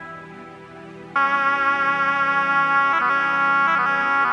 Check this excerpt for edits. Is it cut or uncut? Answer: cut